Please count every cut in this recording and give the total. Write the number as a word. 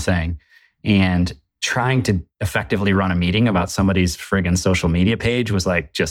one